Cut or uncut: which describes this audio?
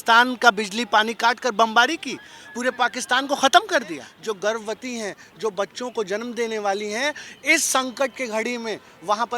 cut